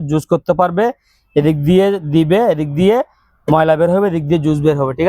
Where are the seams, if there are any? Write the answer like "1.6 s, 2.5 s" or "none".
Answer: none

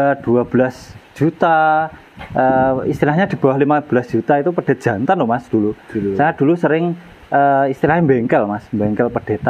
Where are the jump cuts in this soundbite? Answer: none

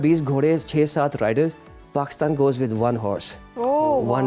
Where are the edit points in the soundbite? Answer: none

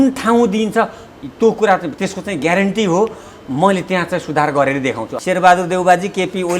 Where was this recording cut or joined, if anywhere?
5.1 s

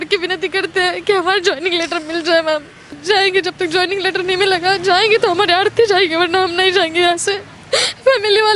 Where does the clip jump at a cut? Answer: 2.8 s, 7.5 s

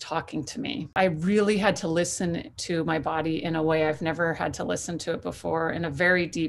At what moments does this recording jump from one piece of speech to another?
0.9 s

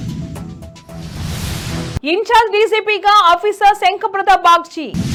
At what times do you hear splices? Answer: none

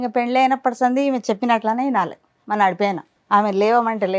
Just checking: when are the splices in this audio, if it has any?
3.1 s

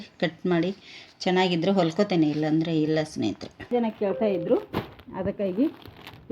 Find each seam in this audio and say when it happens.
3.7 s

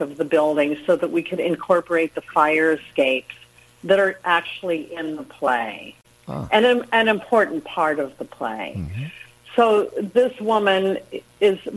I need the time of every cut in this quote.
none

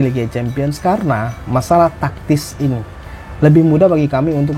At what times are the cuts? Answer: none

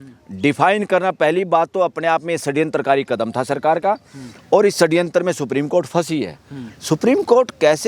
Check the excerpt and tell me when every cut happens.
none

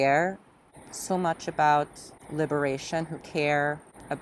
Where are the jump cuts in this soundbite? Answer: none

